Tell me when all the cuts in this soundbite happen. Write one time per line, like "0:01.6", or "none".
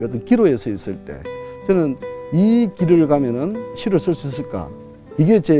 0:03.7